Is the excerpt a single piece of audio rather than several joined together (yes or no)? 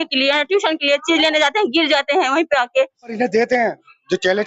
no